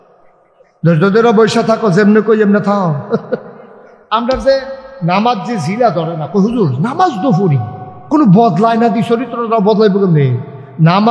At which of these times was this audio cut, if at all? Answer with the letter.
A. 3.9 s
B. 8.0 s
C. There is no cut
A